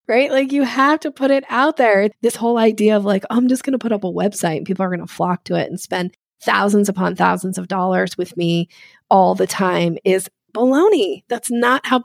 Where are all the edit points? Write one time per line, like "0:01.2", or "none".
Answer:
0:02.1